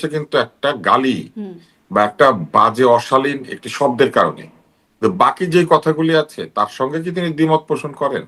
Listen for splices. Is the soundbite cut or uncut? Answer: uncut